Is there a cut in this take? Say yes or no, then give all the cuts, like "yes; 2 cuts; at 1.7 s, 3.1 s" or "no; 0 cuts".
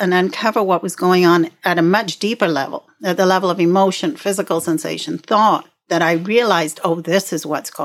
yes; 1 cut; at 1.6 s